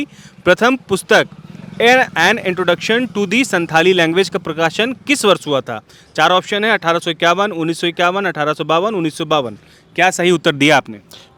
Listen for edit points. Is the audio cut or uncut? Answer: uncut